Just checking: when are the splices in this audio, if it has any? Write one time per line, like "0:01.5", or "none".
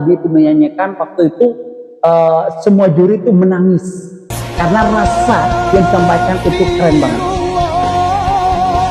0:07.1